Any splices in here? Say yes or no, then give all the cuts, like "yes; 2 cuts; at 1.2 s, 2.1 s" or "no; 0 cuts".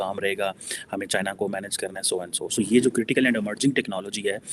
no; 0 cuts